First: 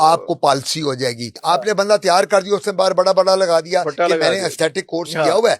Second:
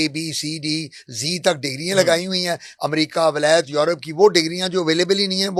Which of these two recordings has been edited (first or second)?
first